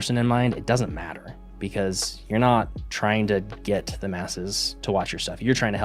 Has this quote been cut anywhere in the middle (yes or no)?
no